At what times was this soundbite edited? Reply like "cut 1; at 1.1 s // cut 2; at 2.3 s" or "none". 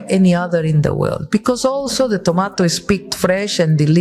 cut 1; at 1.2 s